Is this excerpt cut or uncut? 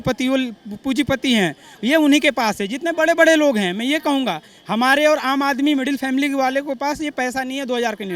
uncut